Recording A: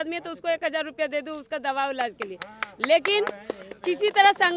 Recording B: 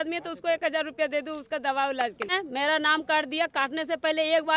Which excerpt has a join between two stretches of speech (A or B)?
B